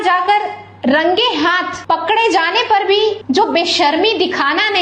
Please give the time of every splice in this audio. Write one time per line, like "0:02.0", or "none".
0:01.7
0:03.2